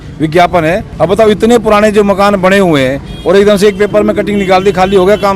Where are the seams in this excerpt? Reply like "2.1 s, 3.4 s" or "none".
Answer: none